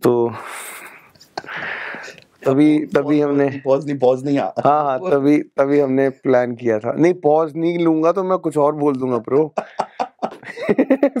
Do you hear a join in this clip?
no; 0 cuts

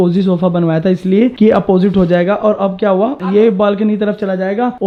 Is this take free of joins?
yes; 0 cuts

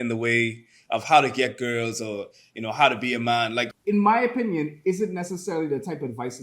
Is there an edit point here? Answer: yes; 1 cut; at 3.7 s

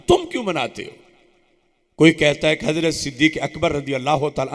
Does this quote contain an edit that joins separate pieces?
no; 0 cuts

